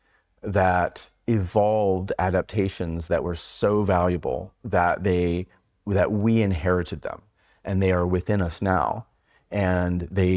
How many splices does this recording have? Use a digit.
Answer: 0